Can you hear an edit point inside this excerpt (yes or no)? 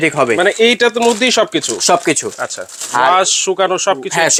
no